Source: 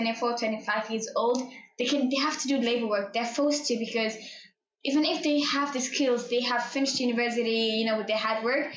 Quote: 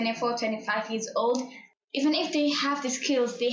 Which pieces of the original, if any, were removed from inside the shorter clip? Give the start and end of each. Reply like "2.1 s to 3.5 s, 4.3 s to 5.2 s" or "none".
1.6 s to 4.5 s

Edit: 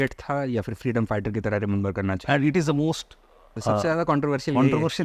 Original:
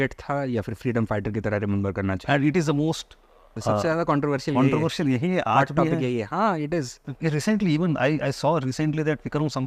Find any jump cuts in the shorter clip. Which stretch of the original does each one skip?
none

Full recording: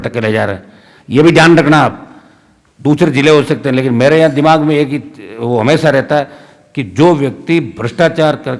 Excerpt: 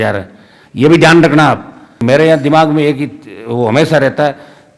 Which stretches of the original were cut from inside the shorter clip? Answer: 2.3 s to 3.9 s

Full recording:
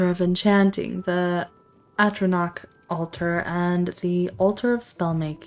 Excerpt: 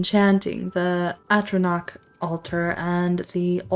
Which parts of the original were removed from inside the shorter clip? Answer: 1.5 s to 1.9 s

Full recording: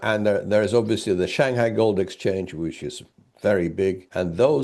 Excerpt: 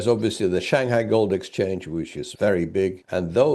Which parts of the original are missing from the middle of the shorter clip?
2.9 s to 3.2 s

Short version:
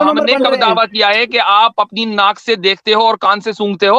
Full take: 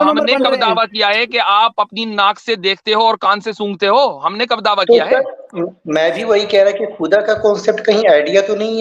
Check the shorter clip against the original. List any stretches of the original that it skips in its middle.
none

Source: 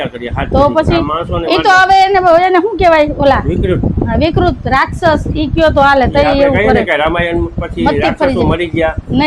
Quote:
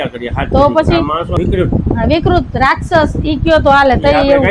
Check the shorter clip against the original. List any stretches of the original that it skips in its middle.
1.3 s to 3.5 s

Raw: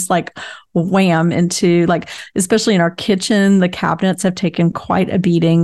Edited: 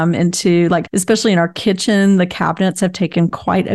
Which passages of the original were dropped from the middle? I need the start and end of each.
2.1 s to 2.3 s

